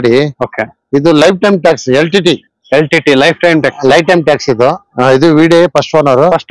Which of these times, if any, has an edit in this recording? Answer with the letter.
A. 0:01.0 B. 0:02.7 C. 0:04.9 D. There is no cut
C